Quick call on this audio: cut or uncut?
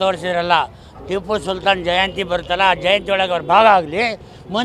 uncut